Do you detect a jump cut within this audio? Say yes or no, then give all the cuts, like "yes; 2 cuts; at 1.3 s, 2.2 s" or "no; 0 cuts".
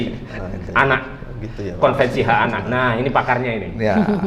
no; 0 cuts